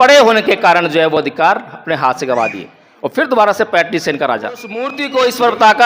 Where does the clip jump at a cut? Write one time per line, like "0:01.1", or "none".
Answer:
0:05.0